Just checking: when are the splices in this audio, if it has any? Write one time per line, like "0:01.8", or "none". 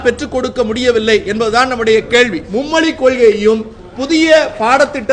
0:02.4